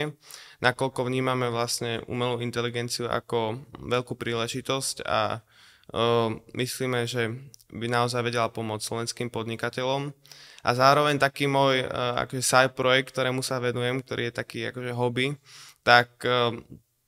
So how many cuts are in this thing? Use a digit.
0